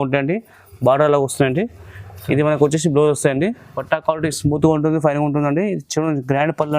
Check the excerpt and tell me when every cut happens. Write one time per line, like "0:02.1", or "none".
0:03.8